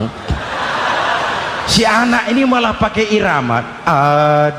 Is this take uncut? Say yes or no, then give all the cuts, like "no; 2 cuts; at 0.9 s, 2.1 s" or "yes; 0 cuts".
yes; 0 cuts